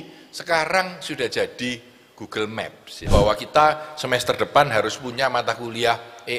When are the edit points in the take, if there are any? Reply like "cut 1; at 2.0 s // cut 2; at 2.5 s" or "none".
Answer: cut 1; at 3.1 s